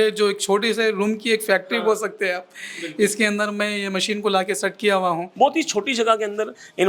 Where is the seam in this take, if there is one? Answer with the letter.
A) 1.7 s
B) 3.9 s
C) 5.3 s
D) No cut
C